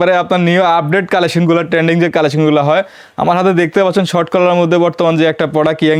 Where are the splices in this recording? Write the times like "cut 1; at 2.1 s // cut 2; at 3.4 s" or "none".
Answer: none